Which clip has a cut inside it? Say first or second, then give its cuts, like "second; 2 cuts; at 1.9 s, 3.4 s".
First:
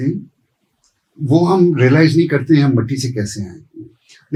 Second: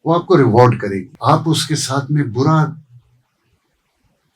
second; 1 cut; at 1.1 s